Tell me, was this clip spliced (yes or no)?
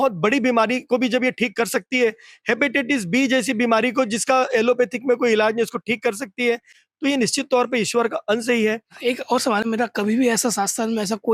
no